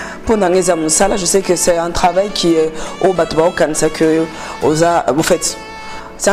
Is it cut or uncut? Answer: uncut